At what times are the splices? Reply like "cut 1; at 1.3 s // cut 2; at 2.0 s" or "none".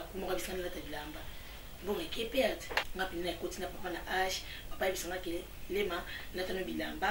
cut 1; at 2.9 s